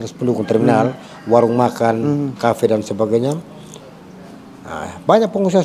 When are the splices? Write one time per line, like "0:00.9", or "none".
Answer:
none